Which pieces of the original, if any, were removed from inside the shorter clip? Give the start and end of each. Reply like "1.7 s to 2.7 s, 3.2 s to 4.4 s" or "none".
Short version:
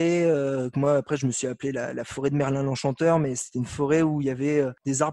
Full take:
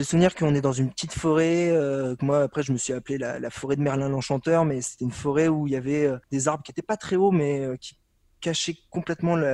none